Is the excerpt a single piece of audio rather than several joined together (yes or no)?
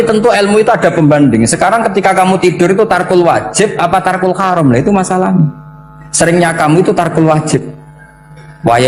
yes